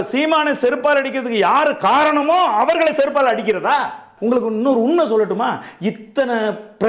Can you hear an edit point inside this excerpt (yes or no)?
yes